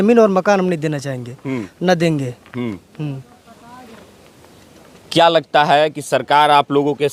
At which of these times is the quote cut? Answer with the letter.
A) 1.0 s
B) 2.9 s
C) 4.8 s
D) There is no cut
D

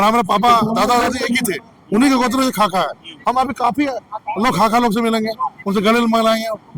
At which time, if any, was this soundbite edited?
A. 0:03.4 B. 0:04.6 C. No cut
C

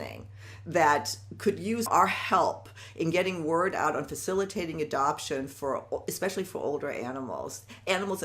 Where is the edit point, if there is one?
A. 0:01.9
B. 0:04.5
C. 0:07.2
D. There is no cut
A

